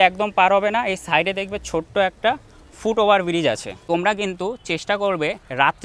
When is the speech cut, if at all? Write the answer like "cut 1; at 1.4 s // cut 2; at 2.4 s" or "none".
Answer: cut 1; at 3.7 s

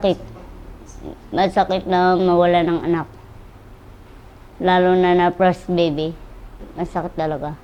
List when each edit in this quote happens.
none

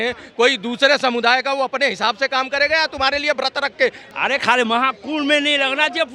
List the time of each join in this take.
cut 1; at 4.0 s

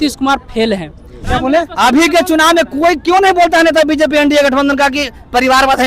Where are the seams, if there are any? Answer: cut 1; at 1.2 s

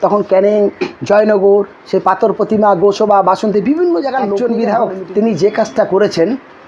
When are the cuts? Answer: cut 1; at 4.4 s

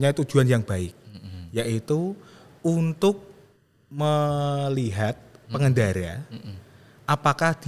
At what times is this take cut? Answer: none

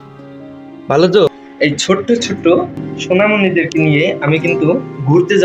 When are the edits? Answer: cut 1; at 1.4 s

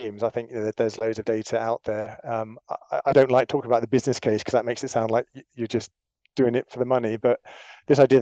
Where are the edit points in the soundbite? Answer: none

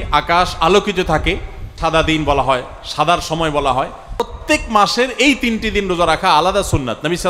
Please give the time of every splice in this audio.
cut 1; at 1.6 s // cut 2; at 4.4 s

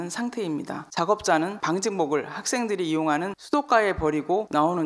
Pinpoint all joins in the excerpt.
cut 1; at 0.9 s

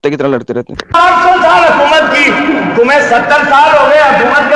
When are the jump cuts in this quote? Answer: none

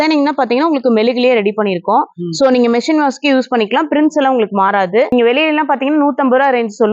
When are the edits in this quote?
cut 1; at 5.1 s

